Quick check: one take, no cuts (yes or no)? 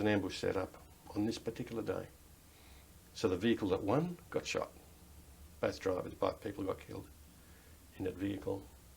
yes